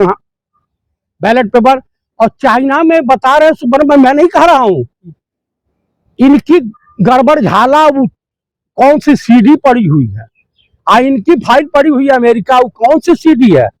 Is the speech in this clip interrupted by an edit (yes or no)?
no